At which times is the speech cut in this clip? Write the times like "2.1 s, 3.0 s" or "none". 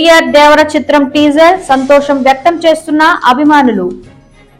none